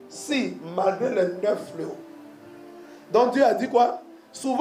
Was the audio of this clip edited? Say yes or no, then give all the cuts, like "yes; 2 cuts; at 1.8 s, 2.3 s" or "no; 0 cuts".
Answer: no; 0 cuts